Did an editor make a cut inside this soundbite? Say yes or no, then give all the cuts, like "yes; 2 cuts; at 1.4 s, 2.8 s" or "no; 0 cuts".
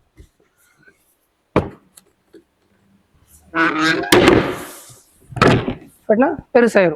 no; 0 cuts